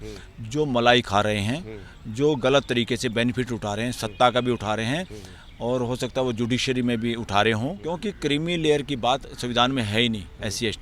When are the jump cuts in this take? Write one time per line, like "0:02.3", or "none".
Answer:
0:07.8